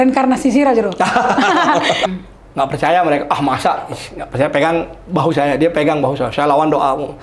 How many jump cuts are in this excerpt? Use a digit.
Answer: 1